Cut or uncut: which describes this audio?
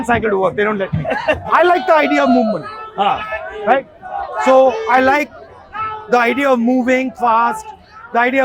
cut